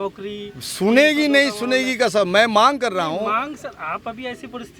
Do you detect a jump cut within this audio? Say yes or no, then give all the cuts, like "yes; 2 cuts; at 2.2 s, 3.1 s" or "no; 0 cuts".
no; 0 cuts